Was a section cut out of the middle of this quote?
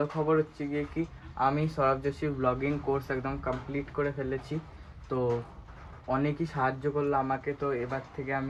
no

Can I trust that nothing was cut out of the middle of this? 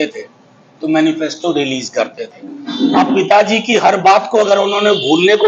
yes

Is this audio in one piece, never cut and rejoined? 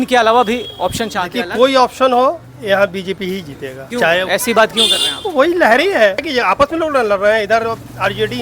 yes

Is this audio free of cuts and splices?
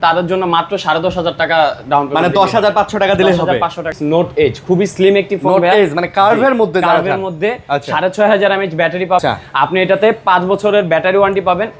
no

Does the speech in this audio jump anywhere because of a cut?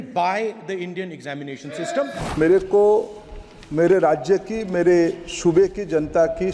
yes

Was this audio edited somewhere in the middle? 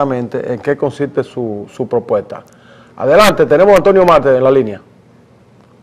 no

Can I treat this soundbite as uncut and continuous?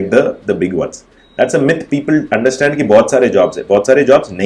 yes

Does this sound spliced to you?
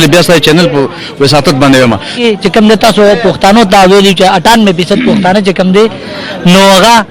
yes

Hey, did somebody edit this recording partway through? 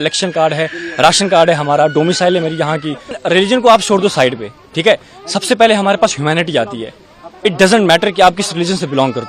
yes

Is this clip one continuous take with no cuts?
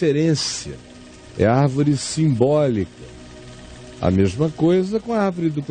no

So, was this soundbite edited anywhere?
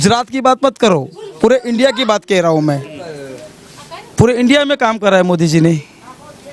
no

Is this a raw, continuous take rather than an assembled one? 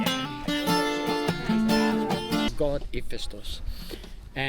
no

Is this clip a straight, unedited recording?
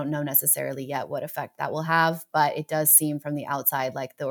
yes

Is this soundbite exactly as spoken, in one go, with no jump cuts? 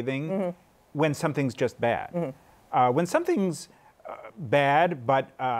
yes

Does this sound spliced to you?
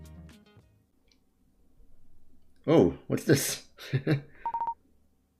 yes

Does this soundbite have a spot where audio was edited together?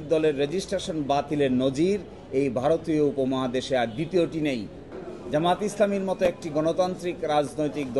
yes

